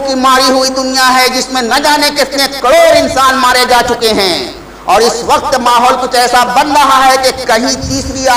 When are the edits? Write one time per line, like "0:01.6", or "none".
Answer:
none